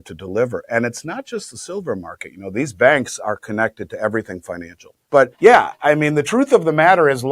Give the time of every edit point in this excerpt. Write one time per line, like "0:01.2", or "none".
0:05.2